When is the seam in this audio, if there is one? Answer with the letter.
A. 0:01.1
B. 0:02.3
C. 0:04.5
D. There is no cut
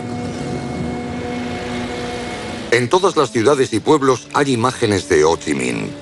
B